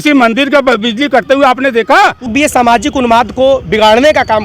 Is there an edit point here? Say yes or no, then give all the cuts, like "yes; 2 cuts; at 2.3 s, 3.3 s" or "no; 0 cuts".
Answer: yes; 1 cut; at 2.3 s